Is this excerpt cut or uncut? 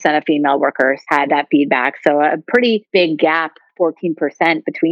cut